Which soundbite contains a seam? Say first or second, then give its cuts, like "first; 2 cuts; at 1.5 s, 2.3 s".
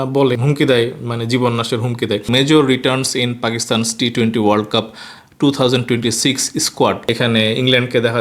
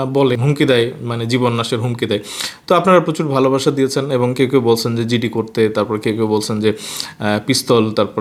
first; 2 cuts; at 2.3 s, 7.0 s